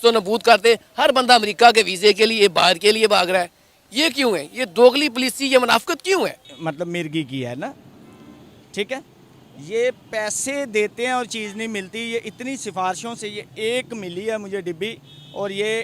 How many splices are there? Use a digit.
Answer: 1